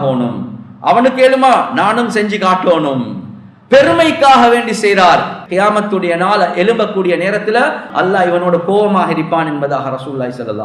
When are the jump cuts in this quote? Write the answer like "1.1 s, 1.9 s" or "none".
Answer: 5.4 s, 7.8 s